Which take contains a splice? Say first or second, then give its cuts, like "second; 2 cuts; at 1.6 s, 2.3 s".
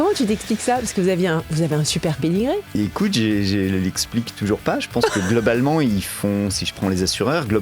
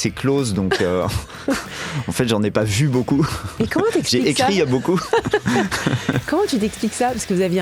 first; 1 cut; at 2.7 s